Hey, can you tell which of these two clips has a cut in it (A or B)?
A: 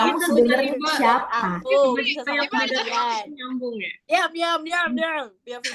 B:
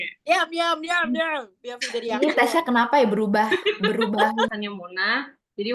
B